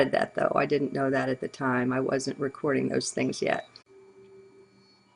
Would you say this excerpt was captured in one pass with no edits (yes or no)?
yes